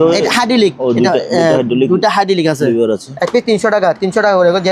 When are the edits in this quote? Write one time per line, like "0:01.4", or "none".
0:03.1